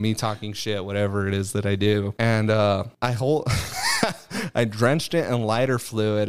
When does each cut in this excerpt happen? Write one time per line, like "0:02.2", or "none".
0:02.1
0:02.9